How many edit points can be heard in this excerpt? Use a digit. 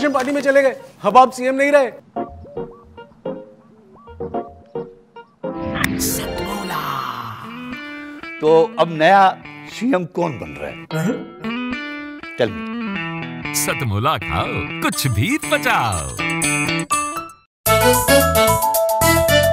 1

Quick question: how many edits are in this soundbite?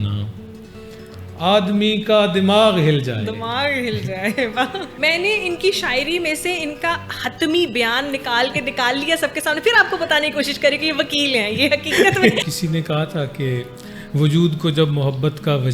2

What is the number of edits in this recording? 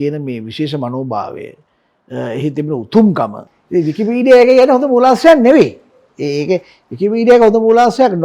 1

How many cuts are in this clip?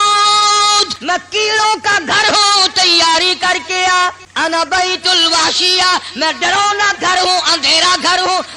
2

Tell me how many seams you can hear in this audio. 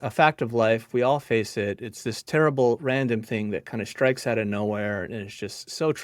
0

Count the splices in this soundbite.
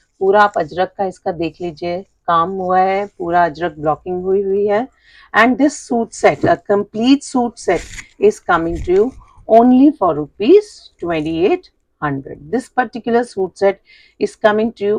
0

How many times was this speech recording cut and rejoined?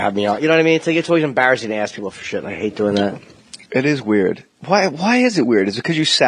0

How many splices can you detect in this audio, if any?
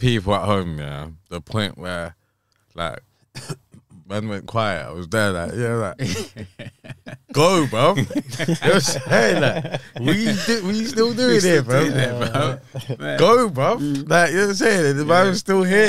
0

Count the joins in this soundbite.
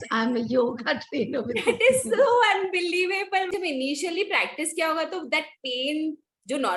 1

